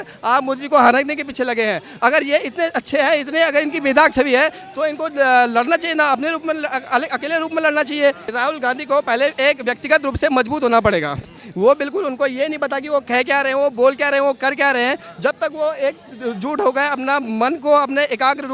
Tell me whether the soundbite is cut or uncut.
cut